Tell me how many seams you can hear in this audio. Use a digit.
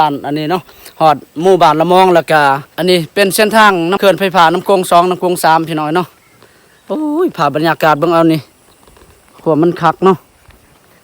2